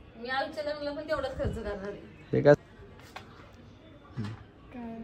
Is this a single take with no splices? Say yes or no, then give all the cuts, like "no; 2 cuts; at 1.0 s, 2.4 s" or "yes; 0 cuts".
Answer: no; 1 cut; at 2.6 s